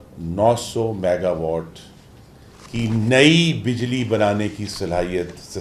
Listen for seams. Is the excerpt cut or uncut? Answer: uncut